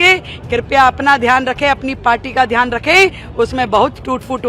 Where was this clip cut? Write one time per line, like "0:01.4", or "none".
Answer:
none